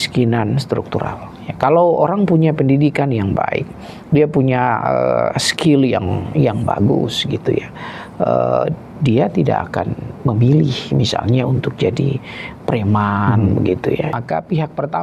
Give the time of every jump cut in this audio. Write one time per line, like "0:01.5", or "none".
0:14.1